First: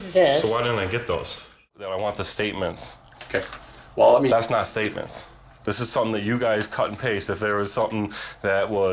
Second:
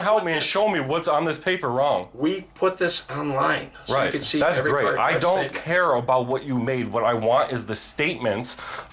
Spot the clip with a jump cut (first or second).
first